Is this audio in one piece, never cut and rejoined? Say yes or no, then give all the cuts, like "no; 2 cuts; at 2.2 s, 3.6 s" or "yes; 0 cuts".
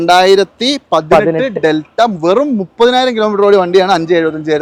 yes; 0 cuts